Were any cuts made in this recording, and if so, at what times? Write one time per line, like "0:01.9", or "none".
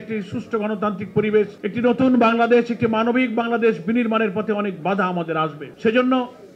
0:01.6
0:05.6